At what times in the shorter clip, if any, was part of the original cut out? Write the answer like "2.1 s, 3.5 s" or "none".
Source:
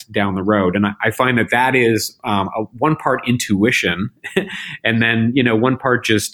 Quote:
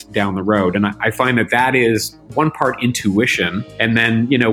2.2 s, 3.6 s